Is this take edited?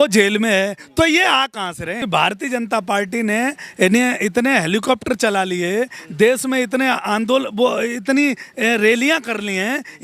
yes; 1 cut; at 2.0 s

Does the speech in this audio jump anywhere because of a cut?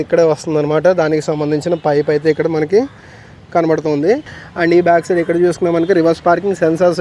yes; 1 cut; at 4.3 s

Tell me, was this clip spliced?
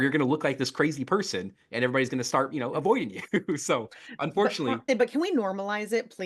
yes; 1 cut; at 4.8 s

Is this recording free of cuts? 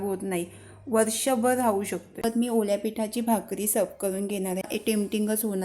no; 2 cuts; at 2.0 s, 4.7 s

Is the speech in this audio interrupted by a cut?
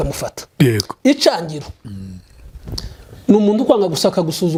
no; 0 cuts

